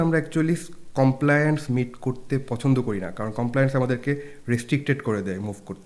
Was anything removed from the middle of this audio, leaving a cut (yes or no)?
no